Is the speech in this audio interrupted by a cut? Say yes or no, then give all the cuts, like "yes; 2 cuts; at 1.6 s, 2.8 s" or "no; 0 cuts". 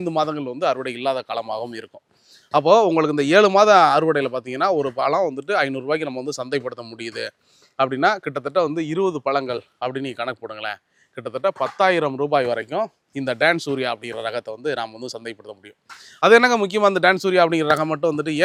no; 0 cuts